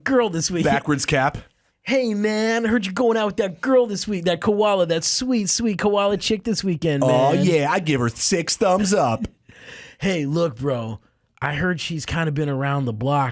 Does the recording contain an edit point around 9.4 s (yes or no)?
no